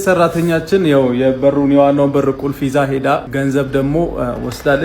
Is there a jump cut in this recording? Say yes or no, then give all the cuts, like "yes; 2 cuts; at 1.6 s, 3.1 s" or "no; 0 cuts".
yes; 1 cut; at 3.3 s